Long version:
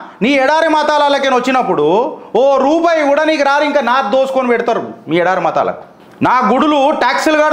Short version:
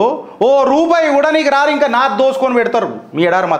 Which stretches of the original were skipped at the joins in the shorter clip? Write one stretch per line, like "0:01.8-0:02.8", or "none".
none